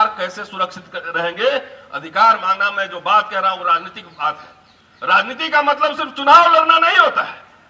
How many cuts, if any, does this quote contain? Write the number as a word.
zero